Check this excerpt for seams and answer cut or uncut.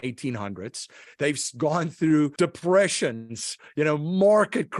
cut